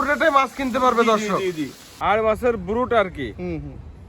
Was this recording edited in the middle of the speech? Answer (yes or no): yes